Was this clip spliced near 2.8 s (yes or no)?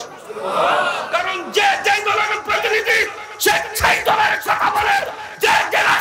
no